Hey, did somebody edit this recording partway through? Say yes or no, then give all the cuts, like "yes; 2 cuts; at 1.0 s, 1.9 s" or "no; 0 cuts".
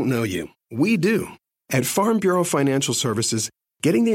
yes; 1 cut; at 1.4 s